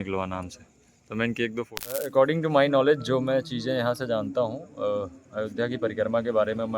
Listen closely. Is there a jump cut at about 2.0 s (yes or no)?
yes